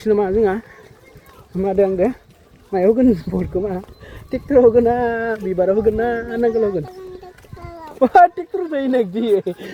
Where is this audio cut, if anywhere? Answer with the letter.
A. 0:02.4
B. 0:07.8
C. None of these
C